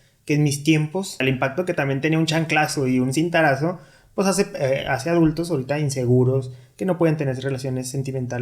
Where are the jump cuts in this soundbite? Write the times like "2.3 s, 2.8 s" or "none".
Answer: 1.2 s

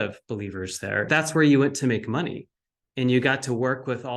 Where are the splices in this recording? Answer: 1.1 s

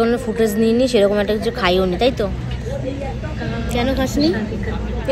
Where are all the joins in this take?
none

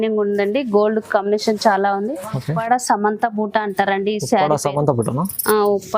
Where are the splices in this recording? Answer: 2.6 s

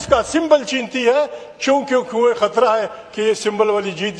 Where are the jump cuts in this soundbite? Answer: none

